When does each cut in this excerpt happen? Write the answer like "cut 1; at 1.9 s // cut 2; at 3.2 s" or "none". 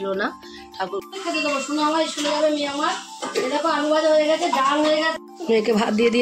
cut 1; at 1.0 s // cut 2; at 5.2 s

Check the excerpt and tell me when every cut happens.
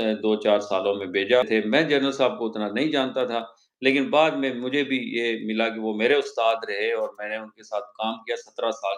cut 1; at 1.5 s

